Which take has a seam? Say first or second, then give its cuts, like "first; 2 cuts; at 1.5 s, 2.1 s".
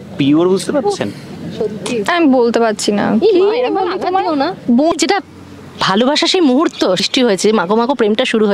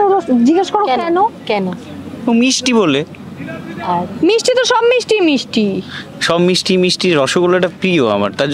first; 2 cuts; at 4.9 s, 7.0 s